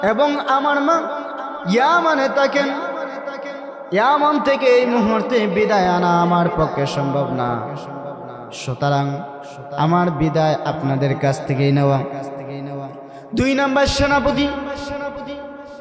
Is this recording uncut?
yes; 0 cuts

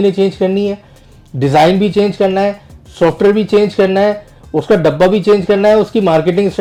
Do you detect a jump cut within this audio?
no; 0 cuts

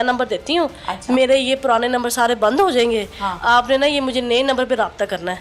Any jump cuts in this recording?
no; 0 cuts

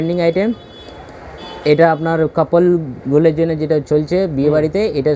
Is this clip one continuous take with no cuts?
yes; 0 cuts

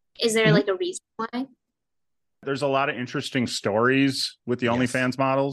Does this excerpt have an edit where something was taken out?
yes; 1 cut; at 2.4 s

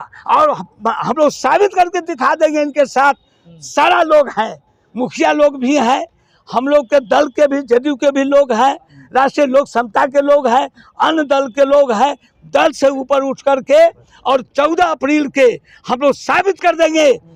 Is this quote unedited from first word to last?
yes; 0 cuts

